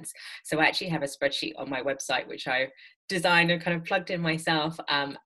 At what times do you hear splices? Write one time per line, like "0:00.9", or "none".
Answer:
none